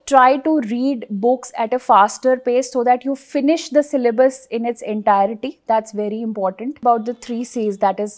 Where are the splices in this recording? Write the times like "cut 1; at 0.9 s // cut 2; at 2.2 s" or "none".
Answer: cut 1; at 6.8 s